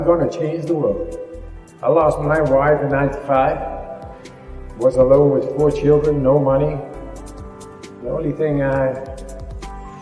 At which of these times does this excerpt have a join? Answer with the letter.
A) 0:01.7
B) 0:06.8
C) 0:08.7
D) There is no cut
A